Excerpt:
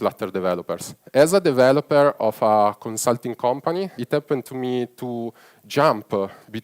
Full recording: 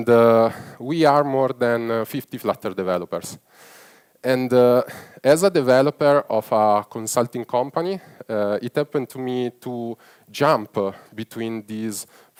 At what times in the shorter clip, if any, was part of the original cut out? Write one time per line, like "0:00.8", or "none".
0:00.9
0:04.0